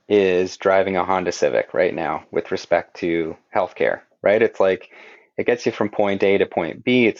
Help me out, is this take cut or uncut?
uncut